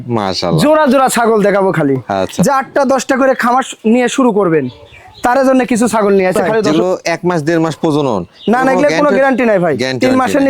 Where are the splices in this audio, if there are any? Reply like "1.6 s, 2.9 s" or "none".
2.3 s, 6.7 s